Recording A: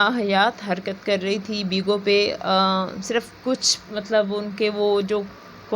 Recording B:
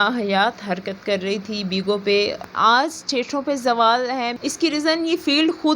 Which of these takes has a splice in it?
B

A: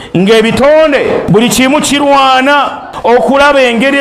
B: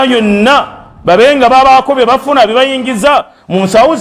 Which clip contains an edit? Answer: A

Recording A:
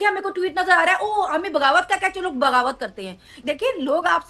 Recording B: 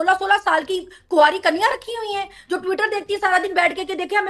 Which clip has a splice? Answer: A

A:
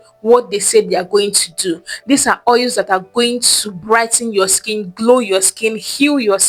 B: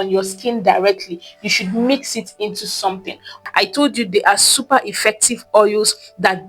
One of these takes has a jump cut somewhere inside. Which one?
B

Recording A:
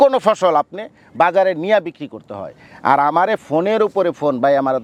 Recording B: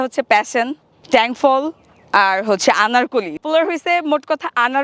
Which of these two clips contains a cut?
B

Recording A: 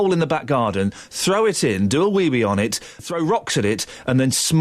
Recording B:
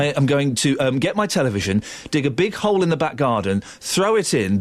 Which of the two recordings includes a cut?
A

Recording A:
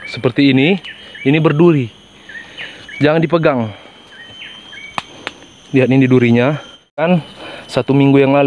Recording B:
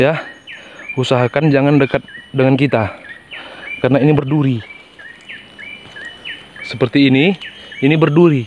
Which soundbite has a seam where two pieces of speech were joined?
A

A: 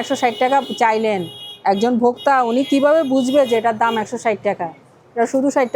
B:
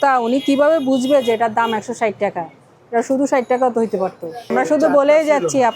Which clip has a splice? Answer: B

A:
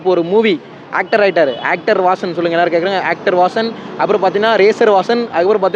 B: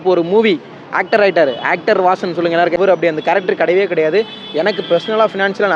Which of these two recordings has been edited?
B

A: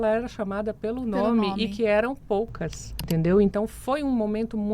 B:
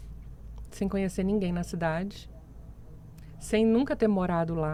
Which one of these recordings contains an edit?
A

